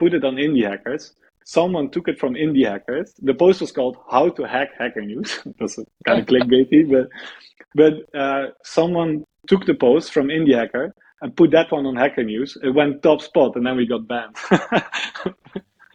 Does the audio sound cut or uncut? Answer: uncut